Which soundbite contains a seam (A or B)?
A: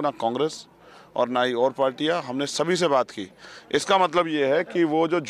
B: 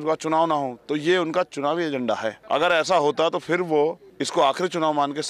B